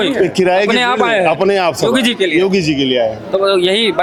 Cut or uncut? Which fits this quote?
uncut